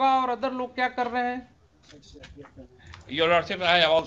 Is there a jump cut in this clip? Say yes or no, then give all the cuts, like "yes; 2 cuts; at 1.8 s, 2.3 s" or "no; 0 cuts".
no; 0 cuts